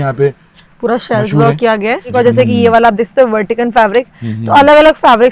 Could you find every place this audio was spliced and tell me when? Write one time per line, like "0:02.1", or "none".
0:02.1

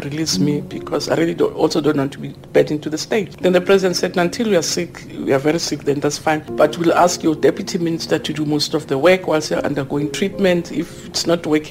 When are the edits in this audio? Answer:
0:03.3
0:06.5

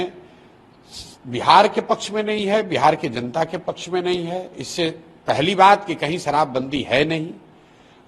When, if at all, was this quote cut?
none

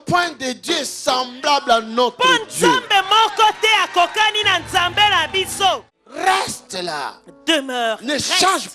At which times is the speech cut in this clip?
0:05.9

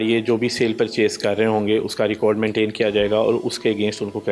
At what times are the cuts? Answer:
none

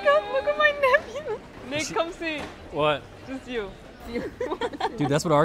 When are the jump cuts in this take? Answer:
0:01.5
0:04.0

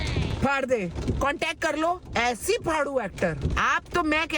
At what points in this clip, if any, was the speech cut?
0:01.0
0:03.4

